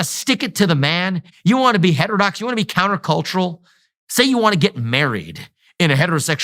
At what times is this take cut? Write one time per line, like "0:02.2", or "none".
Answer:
0:01.3